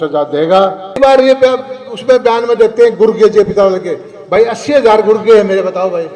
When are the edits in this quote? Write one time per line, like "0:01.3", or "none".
0:01.0